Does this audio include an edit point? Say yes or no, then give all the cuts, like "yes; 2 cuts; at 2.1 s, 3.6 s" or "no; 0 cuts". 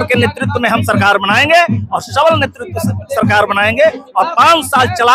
no; 0 cuts